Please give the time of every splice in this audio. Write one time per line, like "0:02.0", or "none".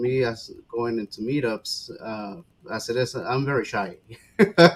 none